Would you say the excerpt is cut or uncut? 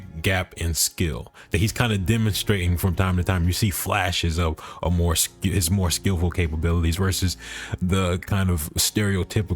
uncut